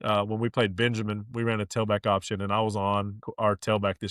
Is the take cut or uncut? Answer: cut